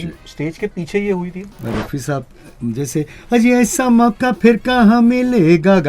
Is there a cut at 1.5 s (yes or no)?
yes